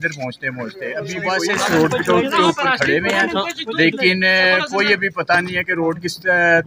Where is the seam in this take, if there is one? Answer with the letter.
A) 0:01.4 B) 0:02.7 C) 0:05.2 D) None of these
A